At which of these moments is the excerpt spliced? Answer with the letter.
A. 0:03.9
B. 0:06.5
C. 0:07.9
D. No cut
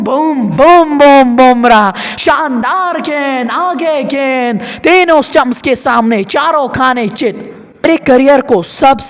C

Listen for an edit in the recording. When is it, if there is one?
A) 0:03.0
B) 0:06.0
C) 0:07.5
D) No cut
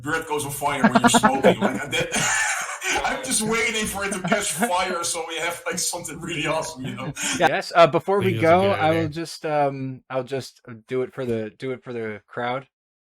C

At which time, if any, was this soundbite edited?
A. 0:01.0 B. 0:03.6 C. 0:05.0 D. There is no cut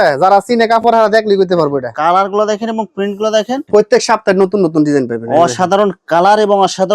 B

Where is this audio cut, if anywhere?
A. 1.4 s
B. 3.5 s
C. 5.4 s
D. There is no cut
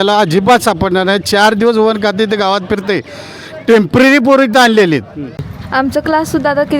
C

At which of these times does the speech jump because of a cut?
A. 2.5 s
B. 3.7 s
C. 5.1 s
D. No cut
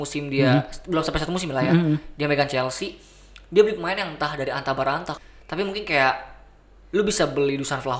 C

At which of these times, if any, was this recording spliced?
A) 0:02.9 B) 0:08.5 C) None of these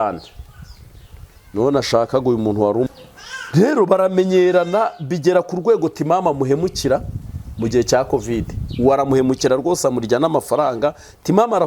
A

